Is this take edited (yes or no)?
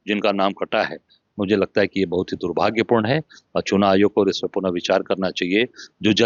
no